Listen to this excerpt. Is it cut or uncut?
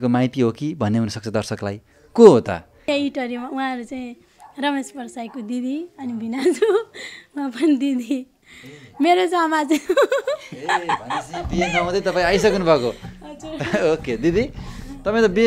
cut